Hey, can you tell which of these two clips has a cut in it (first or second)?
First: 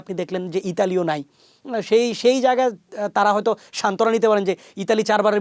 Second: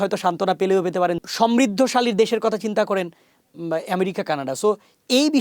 second